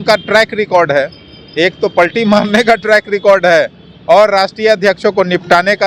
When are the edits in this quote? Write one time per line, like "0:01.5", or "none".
none